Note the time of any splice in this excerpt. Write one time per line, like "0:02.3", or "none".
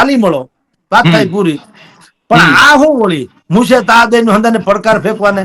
none